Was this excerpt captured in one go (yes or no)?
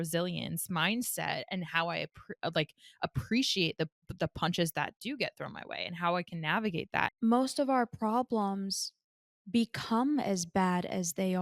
no